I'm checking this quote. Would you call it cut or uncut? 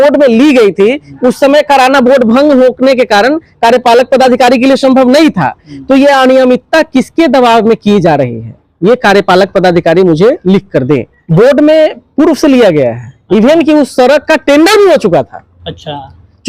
cut